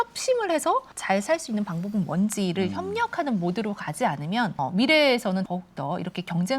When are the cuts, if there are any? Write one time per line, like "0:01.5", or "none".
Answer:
0:00.9
0:04.5
0:05.5